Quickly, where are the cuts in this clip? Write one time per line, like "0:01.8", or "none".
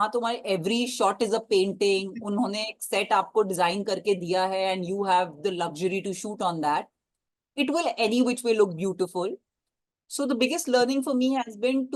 none